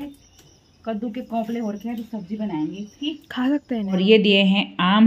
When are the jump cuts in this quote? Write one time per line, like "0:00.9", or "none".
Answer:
0:04.0

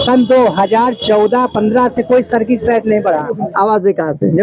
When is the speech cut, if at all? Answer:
0:03.2

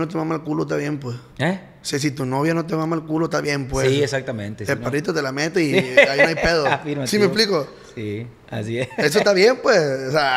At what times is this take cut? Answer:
none

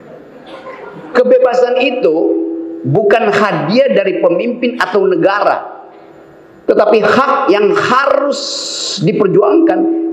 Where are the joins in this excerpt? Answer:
none

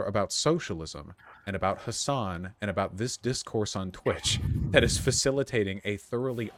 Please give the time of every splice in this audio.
none

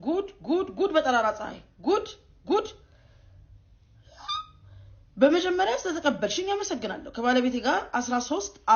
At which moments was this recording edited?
none

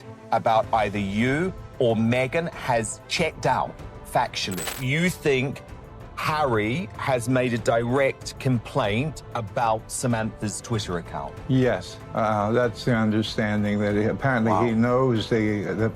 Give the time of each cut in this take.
0:04.5

